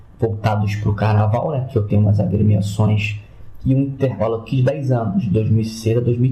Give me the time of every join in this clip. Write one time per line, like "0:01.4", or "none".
none